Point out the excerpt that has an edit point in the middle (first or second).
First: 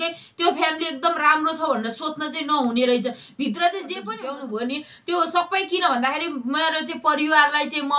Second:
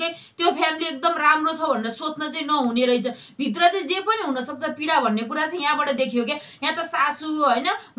first